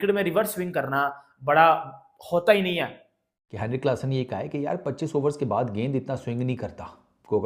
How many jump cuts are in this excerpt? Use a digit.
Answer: 1